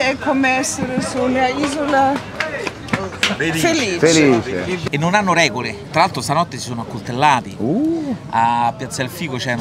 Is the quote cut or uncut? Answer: cut